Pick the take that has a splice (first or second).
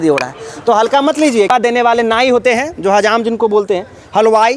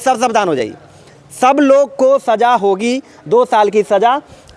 first